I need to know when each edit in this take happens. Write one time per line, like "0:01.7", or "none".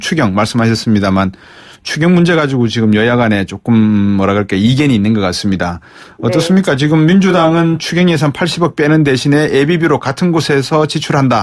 0:02.6